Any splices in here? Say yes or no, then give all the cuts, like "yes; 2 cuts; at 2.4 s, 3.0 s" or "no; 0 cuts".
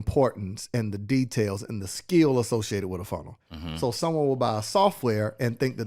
no; 0 cuts